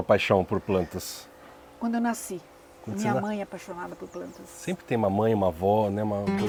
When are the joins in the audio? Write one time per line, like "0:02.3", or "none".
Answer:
none